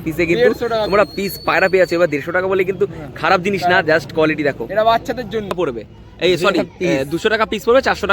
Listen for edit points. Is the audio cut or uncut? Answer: cut